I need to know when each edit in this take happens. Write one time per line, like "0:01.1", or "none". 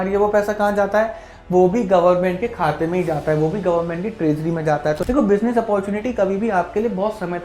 0:05.0